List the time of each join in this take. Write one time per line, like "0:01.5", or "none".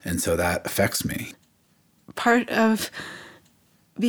0:01.3